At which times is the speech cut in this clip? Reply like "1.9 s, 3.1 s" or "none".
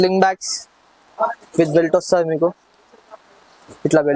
none